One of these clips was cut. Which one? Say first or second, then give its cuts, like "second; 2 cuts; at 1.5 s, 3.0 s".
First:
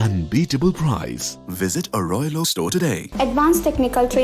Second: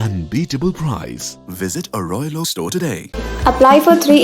first; 1 cut; at 3.0 s